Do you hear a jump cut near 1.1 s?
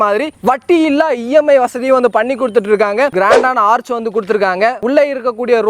no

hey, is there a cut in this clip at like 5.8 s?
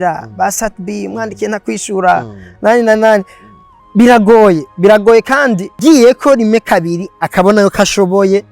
yes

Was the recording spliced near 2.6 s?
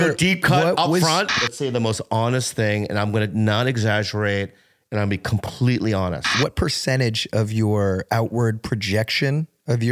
no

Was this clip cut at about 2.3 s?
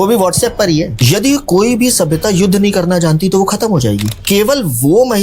no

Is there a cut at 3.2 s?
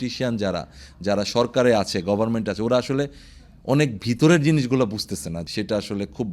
no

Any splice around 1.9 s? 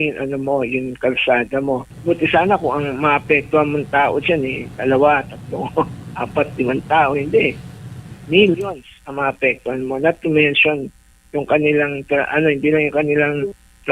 yes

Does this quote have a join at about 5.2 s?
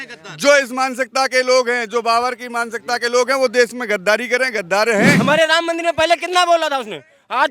yes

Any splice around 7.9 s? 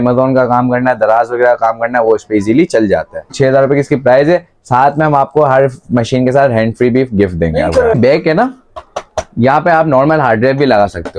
yes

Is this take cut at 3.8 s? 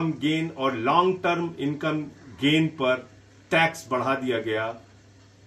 no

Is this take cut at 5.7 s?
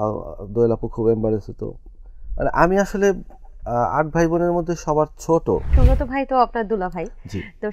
yes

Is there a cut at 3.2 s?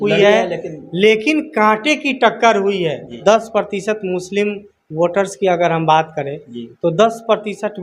yes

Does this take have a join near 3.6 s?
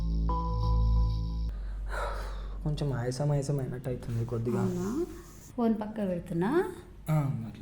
no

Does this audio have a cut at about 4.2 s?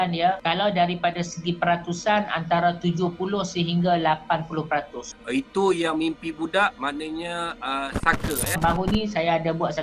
no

